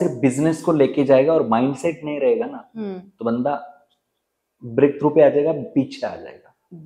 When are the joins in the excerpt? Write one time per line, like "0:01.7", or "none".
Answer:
none